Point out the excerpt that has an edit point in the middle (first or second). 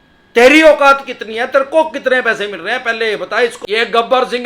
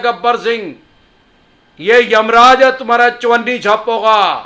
first